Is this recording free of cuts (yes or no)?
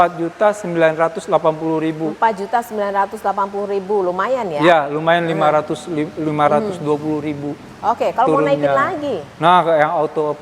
yes